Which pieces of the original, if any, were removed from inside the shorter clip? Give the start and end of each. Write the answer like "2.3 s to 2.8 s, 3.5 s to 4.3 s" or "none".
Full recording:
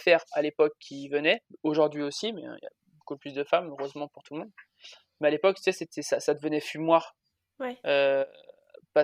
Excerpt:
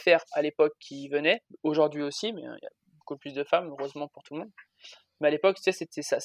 none